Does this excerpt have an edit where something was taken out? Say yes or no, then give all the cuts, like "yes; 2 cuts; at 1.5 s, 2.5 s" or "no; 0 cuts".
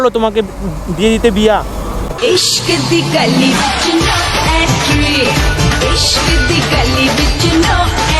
yes; 1 cut; at 2.1 s